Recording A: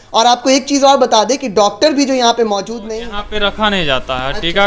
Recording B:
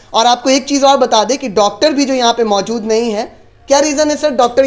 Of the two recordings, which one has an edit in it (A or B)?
A